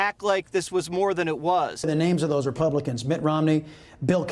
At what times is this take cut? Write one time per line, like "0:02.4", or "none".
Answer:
0:01.8